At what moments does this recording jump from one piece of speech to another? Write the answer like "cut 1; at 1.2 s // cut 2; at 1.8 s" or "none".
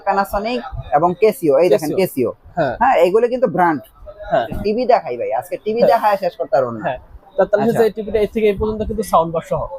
cut 1; at 4.6 s